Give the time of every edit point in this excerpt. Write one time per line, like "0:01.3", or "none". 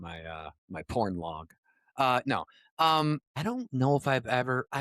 none